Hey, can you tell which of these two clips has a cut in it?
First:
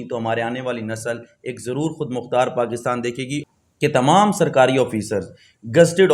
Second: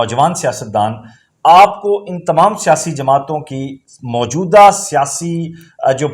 first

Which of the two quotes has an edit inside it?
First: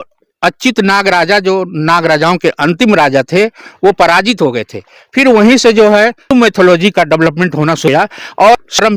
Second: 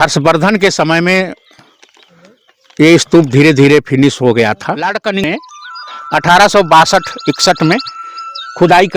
second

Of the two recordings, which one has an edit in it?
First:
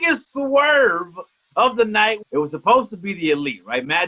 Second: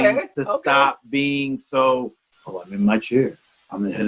first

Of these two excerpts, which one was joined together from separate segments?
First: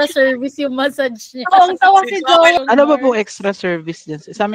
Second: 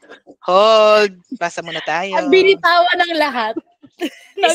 first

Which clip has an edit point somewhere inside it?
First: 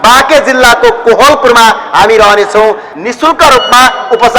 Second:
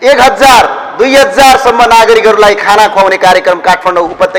first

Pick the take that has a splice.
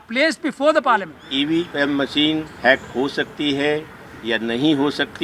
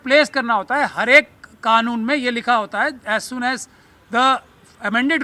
first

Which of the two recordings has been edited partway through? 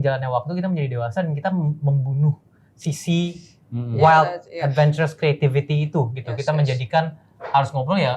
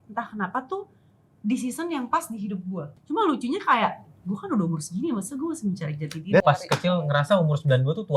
second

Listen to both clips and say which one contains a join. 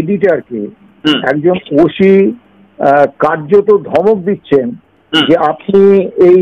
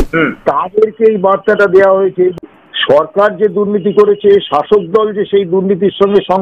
second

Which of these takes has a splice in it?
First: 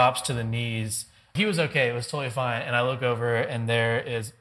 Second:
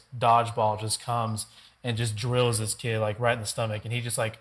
first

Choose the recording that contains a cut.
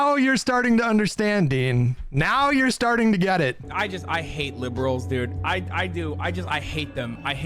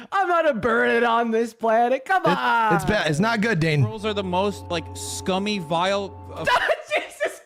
first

